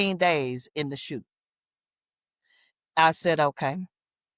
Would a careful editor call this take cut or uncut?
uncut